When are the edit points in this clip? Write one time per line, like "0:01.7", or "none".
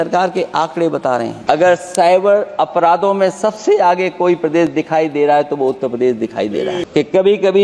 0:01.4
0:06.9